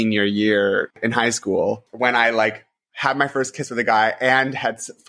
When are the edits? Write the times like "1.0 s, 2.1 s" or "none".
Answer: 0.9 s, 1.9 s